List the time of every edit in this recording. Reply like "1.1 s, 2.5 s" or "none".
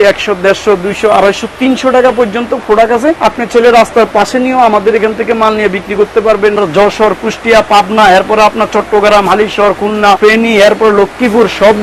3.2 s, 6.6 s, 10.2 s